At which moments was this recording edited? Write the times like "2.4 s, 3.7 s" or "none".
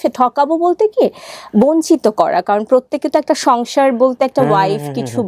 none

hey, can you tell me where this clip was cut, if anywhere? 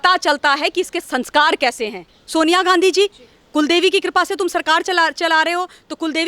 2.2 s

